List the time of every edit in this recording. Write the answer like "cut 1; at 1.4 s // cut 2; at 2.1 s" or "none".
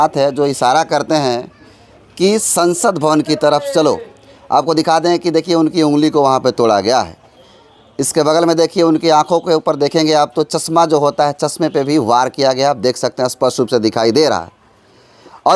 none